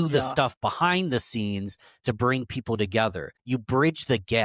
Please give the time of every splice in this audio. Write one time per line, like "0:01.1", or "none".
0:03.3